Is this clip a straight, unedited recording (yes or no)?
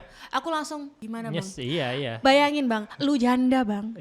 no